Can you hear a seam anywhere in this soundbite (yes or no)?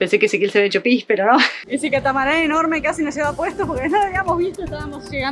yes